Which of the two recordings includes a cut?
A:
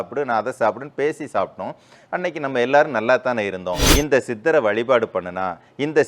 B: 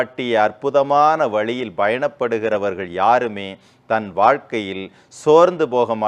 A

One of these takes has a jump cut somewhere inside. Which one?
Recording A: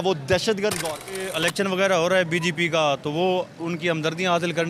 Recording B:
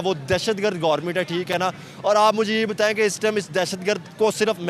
A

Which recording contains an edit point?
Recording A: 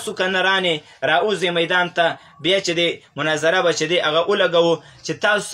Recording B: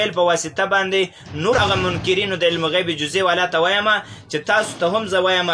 B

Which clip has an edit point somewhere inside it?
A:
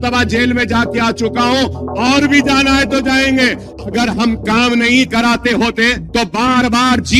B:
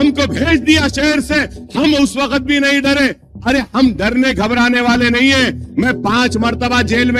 A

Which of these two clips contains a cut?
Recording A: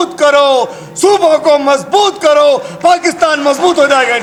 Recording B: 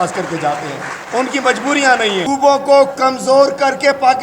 B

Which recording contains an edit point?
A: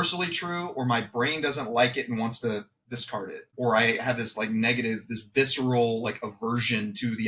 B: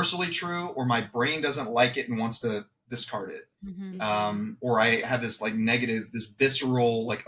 A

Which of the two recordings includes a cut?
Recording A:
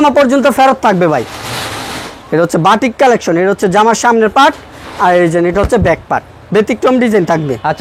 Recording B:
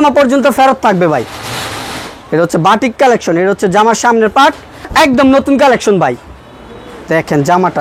B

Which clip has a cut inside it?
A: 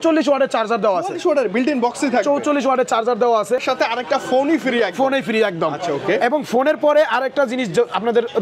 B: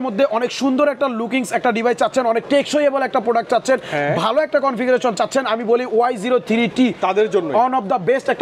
A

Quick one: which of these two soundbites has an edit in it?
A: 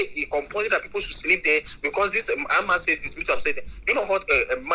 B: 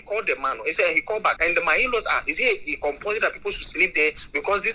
B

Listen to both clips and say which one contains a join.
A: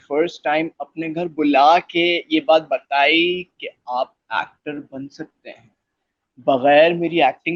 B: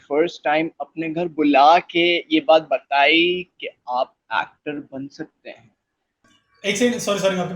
B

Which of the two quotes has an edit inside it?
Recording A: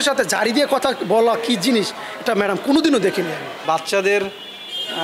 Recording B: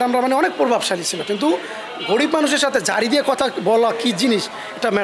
A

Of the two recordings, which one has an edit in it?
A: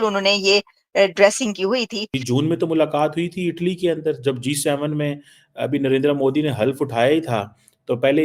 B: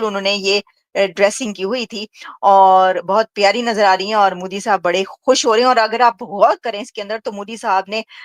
A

